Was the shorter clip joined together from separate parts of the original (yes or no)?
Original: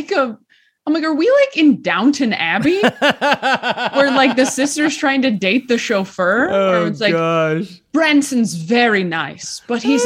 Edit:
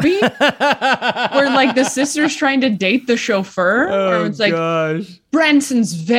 no